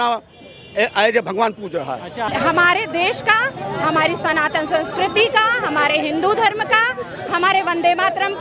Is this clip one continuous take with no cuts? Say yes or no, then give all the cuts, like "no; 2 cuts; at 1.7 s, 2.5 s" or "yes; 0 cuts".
no; 1 cut; at 2.3 s